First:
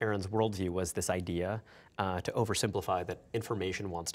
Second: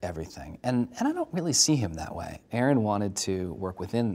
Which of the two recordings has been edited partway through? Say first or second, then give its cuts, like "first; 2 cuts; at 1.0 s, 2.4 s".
second; 1 cut; at 2.4 s